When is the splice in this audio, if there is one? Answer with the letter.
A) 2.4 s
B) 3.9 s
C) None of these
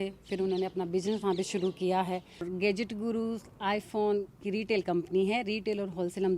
A